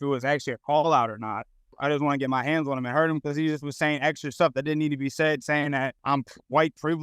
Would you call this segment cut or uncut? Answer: cut